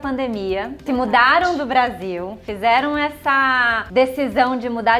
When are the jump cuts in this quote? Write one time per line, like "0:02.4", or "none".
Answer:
0:00.8
0:03.8